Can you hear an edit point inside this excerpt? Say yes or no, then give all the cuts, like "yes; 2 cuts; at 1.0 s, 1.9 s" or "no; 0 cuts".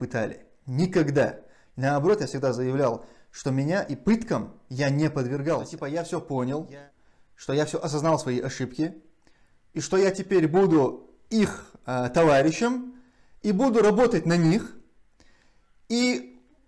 yes; 1 cut; at 5.8 s